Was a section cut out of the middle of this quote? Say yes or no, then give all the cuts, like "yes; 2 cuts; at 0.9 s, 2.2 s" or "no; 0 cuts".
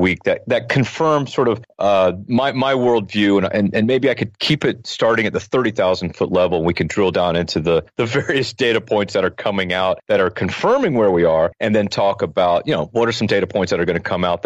no; 0 cuts